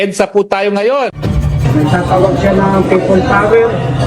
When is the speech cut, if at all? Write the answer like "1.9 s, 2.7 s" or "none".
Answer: 1.2 s